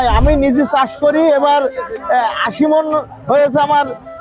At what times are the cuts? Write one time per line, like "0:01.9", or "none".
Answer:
none